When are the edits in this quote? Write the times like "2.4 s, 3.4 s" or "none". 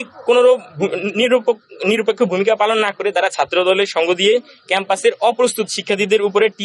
none